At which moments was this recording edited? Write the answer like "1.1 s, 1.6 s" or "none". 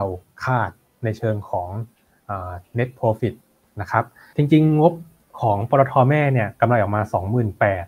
4.2 s